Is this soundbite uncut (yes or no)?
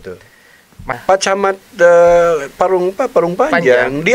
no